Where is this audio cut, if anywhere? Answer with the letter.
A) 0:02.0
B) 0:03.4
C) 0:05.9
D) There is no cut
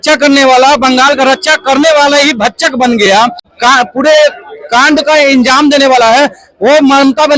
B